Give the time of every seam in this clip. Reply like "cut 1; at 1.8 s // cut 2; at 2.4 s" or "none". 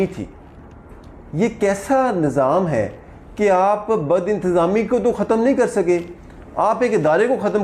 none